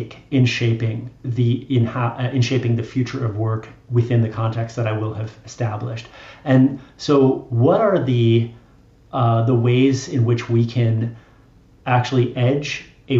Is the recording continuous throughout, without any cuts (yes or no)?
yes